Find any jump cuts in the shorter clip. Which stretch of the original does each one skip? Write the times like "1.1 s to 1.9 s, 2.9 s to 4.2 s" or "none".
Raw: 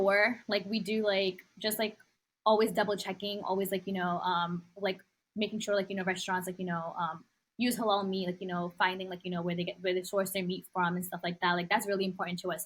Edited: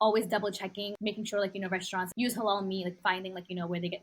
3.4 s to 5.3 s, 6.4 s to 7.5 s, 8.4 s to 8.7 s